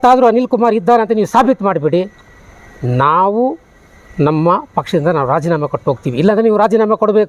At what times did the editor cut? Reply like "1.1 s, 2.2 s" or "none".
none